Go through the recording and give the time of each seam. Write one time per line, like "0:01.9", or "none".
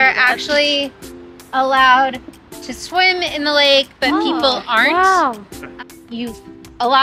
0:05.7